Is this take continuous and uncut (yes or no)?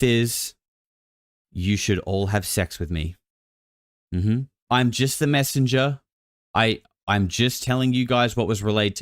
no